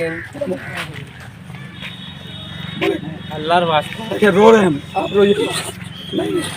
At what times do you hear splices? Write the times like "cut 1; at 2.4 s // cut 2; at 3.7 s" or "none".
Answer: cut 1; at 1.0 s